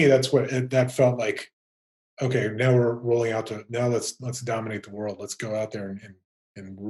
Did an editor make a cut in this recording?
no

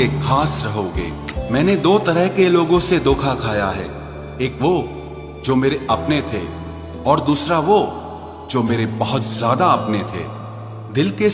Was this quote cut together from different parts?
yes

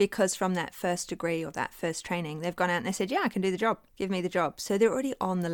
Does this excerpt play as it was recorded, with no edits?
no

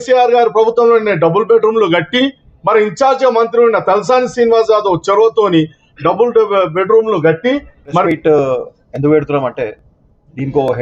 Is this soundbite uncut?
no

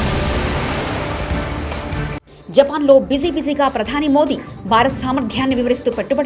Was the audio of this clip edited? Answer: yes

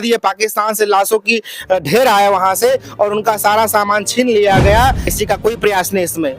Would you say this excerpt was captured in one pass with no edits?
no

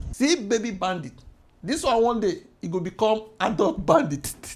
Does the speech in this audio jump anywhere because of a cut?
no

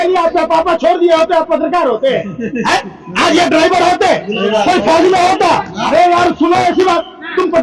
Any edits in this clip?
no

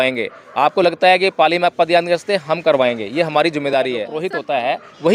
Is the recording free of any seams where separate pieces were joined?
no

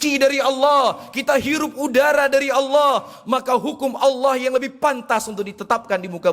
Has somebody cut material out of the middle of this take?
no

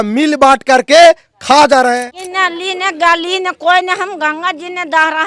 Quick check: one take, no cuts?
no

